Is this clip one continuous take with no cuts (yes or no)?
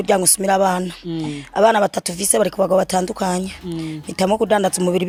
yes